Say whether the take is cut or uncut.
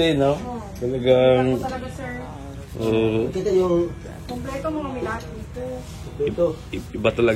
uncut